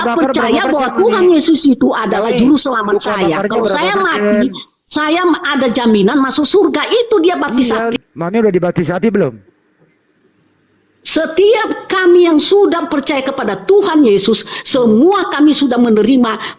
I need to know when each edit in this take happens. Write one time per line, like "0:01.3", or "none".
0:07.9